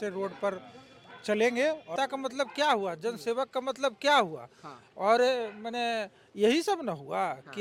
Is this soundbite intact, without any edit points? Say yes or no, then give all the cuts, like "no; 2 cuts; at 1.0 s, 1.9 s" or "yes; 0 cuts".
no; 1 cut; at 1.9 s